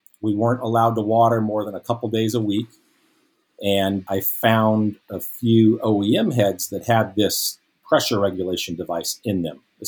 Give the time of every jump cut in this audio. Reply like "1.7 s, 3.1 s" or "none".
4.0 s